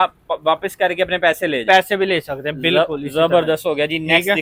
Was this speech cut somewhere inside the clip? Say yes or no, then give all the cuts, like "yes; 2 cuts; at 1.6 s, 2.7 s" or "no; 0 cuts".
no; 0 cuts